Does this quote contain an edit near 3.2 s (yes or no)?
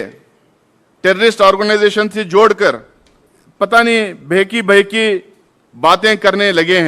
no